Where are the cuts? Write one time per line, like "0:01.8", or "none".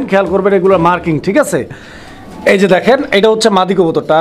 none